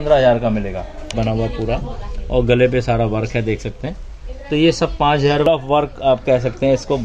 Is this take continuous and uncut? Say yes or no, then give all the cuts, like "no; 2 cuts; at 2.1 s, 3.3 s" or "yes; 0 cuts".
no; 2 cuts; at 1.1 s, 5.5 s